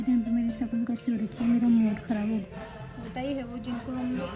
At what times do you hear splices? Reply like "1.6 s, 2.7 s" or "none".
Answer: 2.4 s